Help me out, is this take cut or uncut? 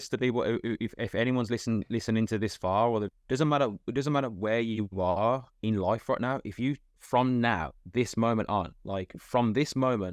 cut